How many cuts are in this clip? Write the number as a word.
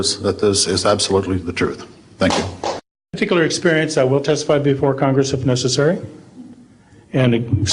one